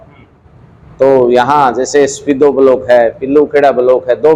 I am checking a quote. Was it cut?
no; 0 cuts

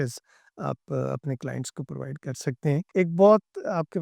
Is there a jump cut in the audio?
yes; 1 cut; at 2.8 s

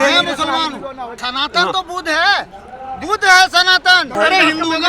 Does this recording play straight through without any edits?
no; 2 cuts; at 1.2 s, 4.1 s

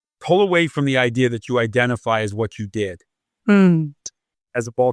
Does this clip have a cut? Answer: yes; 1 cut; at 3.9 s

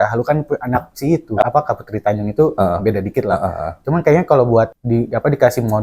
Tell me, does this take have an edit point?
yes; 1 cut; at 1.4 s

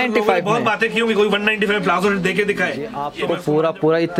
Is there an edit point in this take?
yes; 1 cut; at 3.0 s

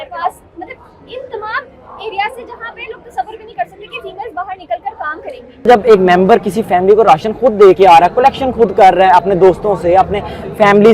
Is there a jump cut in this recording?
yes; 1 cut; at 5.7 s

